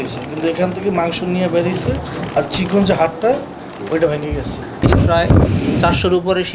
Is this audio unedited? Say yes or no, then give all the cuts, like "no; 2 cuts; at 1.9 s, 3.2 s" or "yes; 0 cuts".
no; 1 cut; at 4.7 s